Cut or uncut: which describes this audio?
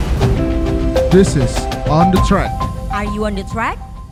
uncut